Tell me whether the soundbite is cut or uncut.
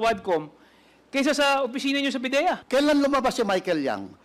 cut